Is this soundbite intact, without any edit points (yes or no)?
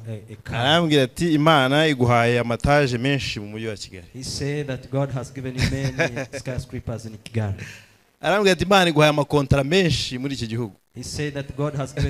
yes